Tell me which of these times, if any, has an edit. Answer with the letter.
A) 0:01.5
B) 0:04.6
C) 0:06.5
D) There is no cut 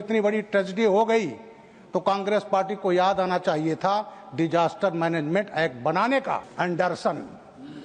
C